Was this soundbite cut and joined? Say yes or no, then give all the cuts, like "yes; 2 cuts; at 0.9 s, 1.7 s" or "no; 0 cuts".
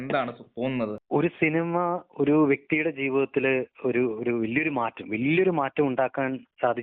yes; 1 cut; at 1.0 s